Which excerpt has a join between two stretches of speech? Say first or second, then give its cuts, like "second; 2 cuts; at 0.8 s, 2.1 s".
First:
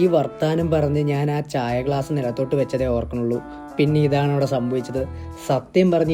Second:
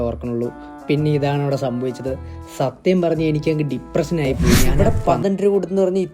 second; 1 cut; at 4.7 s